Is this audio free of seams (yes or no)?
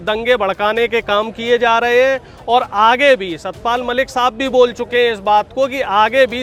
yes